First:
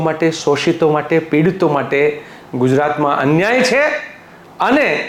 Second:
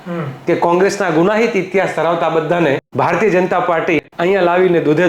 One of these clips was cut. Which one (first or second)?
second